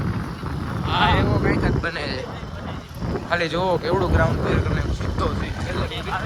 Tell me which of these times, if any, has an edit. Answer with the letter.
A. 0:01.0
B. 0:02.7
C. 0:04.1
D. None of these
D